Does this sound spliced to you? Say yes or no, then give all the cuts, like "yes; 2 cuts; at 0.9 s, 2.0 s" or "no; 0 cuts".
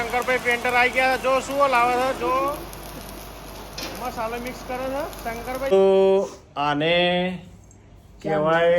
yes; 1 cut; at 5.7 s